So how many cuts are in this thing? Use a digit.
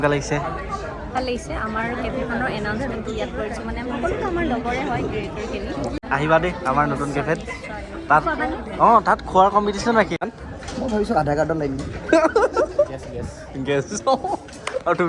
2